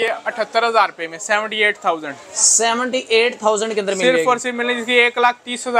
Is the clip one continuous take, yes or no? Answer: yes